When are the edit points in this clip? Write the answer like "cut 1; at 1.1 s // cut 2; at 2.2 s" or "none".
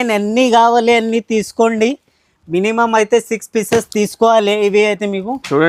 none